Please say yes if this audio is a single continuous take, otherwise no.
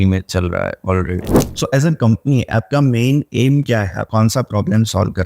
no